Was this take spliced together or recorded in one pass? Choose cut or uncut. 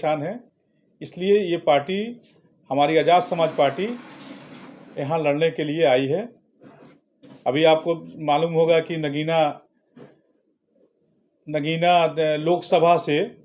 uncut